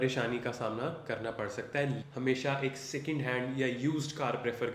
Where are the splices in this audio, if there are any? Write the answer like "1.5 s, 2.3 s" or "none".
2.0 s